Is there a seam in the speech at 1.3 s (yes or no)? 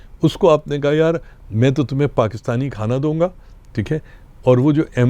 no